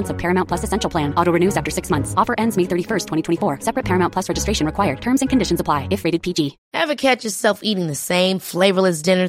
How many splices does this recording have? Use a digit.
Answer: 1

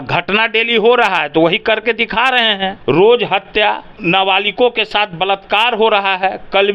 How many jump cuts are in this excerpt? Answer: 2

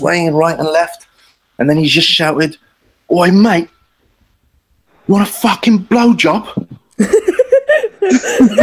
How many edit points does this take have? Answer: 0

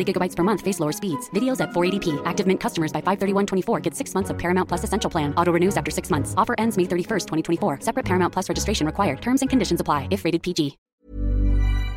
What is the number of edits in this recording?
1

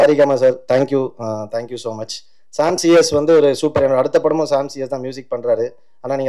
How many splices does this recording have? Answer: 0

